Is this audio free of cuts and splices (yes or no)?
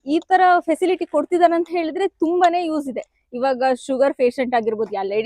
yes